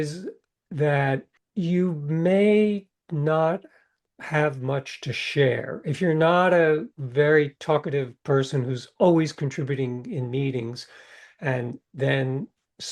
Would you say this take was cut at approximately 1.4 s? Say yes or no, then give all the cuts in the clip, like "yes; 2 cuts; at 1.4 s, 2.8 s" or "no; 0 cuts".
yes; 2 cuts; at 1.4 s, 4.1 s